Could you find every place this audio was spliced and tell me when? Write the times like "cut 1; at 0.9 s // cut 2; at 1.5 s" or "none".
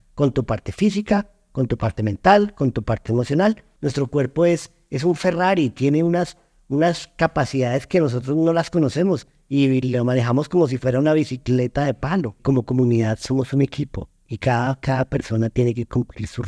cut 1; at 3.7 s // cut 2; at 12.4 s